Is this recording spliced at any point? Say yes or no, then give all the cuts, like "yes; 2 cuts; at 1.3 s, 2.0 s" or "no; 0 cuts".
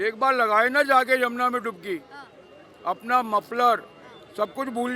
no; 0 cuts